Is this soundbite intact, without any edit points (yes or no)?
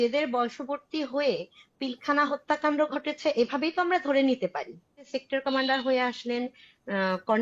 no